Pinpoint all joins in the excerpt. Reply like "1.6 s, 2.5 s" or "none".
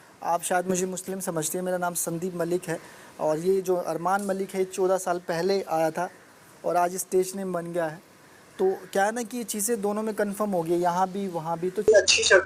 none